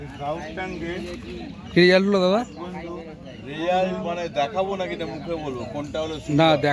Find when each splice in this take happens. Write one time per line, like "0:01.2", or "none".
none